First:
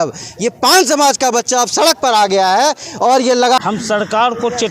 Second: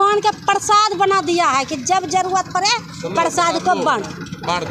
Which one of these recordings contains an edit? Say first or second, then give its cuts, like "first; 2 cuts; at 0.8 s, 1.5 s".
first; 1 cut; at 3.6 s